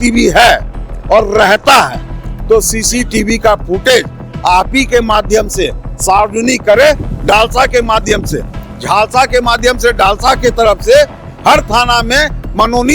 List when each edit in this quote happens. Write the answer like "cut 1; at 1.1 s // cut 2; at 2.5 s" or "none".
cut 1; at 7.1 s